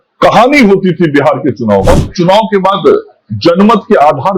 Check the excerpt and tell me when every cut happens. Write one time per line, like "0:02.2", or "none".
0:01.8